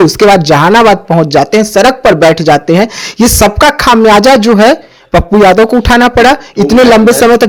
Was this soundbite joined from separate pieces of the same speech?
no; 0 cuts

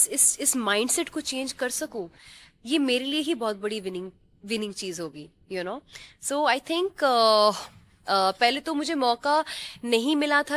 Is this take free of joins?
yes; 0 cuts

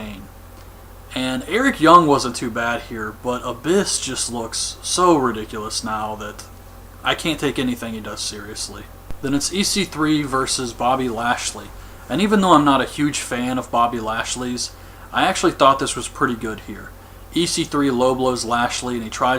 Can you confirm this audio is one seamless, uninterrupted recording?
yes; 0 cuts

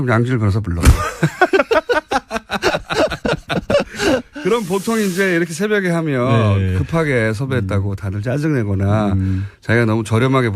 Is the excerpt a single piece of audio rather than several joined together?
no; 1 cut; at 9.1 s

